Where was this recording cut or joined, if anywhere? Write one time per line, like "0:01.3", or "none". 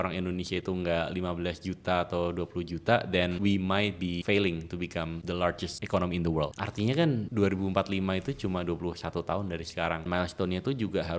0:03.4
0:04.2
0:05.5
0:06.6
0:07.3
0:10.1